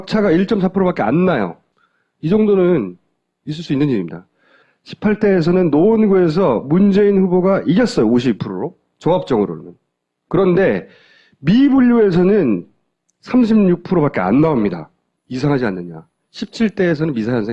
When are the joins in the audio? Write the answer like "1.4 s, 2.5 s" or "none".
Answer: 6.0 s